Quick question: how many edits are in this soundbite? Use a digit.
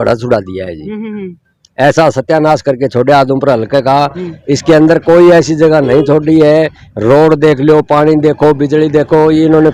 0